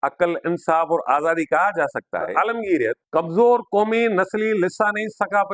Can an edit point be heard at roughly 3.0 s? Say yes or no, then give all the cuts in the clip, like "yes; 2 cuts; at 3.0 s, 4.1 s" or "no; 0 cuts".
yes; 2 cuts; at 2.3 s, 3.0 s